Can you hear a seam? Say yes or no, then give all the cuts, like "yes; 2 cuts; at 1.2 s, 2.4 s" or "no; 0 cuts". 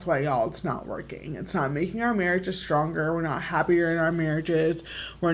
no; 0 cuts